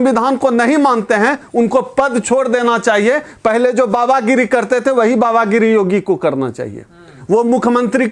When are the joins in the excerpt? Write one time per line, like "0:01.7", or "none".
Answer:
none